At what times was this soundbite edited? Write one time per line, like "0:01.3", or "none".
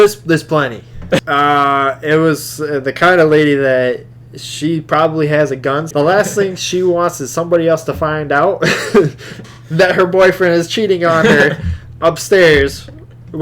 0:01.2
0:05.9